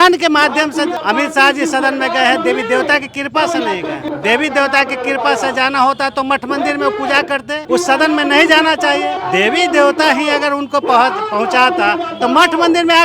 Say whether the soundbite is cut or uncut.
cut